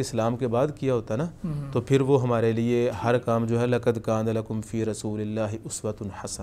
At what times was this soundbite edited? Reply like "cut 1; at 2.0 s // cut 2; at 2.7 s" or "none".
none